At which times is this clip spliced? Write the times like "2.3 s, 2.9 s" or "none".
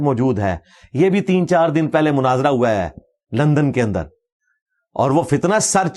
none